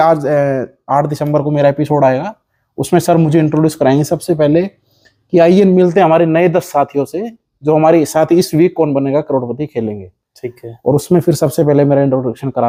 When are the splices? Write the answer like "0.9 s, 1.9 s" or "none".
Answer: none